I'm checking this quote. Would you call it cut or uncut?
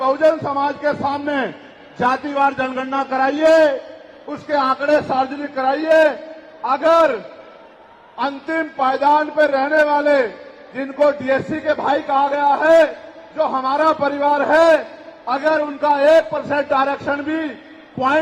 uncut